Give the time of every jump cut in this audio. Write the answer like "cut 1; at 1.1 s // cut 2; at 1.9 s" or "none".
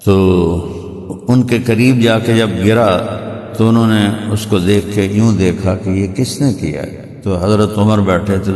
none